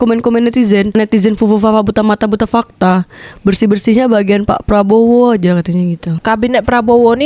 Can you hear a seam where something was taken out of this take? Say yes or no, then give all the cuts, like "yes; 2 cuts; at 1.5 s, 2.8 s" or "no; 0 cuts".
yes; 1 cut; at 6.2 s